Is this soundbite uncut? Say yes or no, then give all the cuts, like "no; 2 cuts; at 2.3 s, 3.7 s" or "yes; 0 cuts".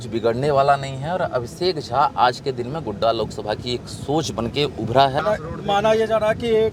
no; 1 cut; at 5.2 s